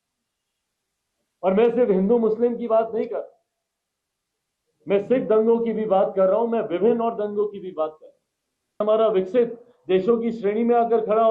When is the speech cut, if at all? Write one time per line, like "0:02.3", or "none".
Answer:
0:08.8